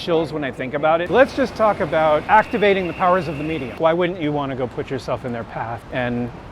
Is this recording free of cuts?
no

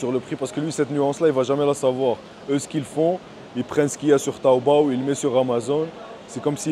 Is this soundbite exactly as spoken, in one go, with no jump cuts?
yes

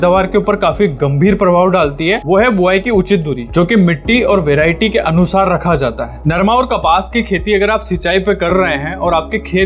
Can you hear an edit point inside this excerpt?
no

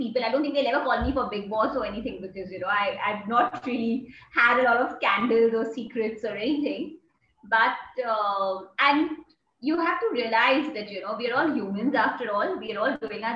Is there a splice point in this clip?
no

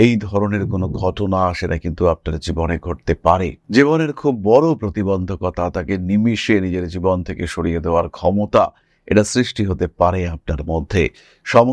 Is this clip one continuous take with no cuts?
yes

